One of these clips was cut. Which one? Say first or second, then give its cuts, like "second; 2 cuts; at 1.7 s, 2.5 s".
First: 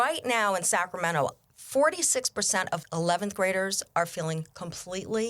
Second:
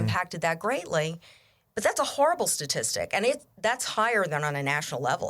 first; 1 cut; at 2.8 s